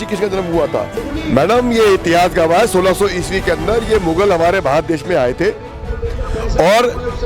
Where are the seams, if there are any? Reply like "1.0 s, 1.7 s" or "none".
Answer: 1.0 s